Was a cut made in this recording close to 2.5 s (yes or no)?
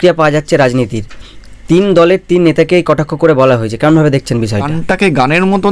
no